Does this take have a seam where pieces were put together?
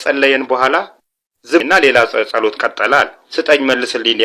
yes; 2 cuts; at 1.6 s, 3.2 s

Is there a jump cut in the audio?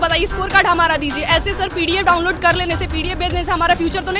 no; 0 cuts

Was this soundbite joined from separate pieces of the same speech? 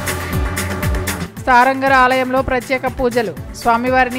no; 0 cuts

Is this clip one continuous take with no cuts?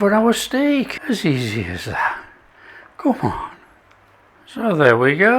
no; 1 cut; at 1.0 s

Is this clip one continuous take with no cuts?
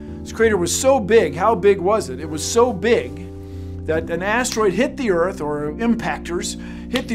yes; 0 cuts

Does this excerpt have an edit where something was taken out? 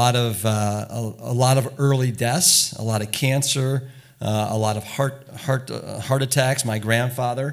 no; 0 cuts

